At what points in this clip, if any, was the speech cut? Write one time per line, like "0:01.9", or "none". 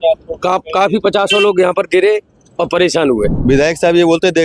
0:03.4